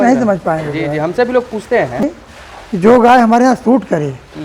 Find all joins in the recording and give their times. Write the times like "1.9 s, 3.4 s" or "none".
2.0 s